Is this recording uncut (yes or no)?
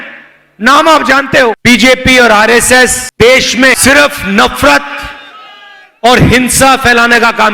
no